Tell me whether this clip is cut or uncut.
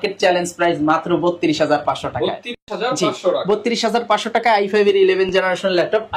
uncut